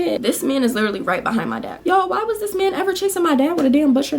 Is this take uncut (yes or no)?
no